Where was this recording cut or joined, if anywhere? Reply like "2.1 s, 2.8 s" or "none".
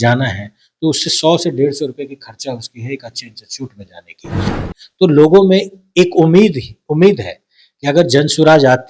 4.5 s